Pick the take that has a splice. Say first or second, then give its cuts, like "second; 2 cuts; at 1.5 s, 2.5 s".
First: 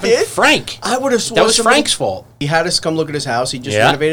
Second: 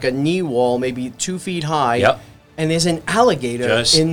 first; 1 cut; at 2.4 s